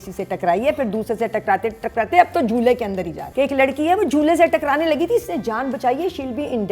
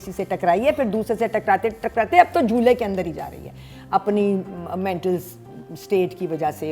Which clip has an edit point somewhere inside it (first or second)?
first